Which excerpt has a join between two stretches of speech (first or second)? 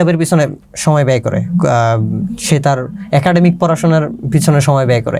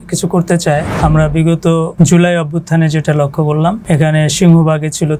second